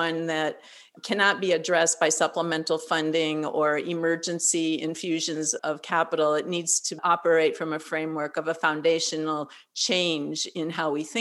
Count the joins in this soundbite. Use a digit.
0